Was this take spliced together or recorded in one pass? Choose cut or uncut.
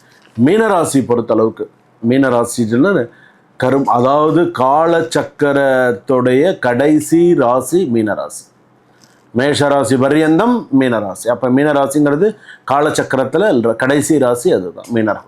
uncut